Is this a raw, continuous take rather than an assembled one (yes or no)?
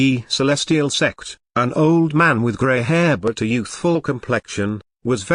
yes